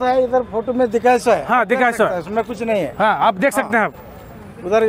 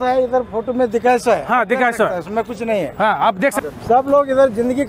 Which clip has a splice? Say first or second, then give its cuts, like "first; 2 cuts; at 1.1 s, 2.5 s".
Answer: second; 1 cut; at 3.6 s